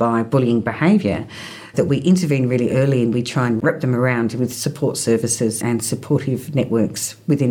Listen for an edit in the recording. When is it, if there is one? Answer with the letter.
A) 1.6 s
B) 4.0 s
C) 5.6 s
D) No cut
C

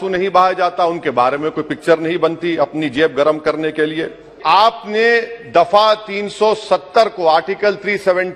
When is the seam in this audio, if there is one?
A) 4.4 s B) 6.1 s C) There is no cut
A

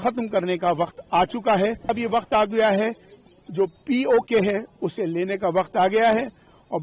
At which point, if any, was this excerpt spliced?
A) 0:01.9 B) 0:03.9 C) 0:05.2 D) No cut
A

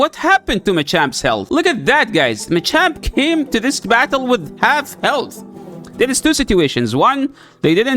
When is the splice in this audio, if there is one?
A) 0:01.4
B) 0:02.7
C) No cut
A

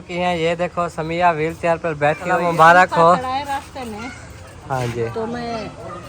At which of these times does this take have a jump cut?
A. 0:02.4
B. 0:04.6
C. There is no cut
A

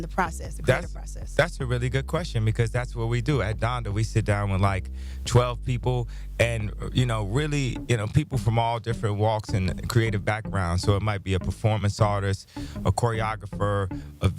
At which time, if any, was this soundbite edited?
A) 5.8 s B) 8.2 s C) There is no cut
A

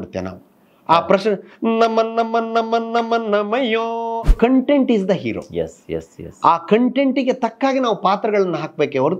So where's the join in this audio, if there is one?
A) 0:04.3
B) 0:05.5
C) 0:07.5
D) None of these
A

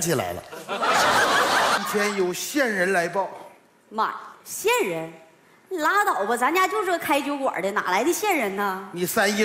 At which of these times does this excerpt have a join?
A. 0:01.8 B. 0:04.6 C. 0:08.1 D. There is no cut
A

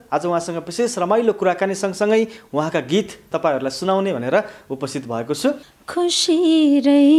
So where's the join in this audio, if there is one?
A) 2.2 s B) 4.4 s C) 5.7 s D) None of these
C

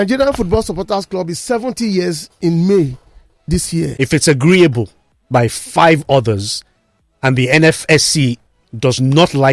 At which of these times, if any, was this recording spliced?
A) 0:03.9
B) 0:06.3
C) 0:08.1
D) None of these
A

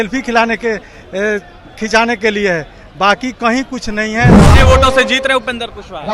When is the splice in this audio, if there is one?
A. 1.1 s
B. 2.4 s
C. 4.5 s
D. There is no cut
C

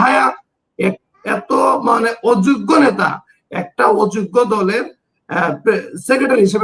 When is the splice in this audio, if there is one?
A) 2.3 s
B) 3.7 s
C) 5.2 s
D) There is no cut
D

